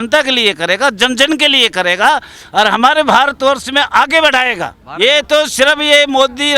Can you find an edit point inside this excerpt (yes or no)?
yes